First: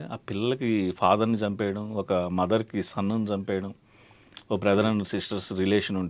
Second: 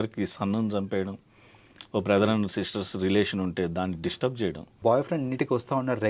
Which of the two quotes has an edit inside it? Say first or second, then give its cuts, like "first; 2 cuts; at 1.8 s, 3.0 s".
second; 1 cut; at 4.8 s